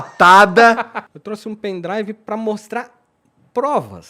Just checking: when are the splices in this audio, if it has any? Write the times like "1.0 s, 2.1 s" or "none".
1.1 s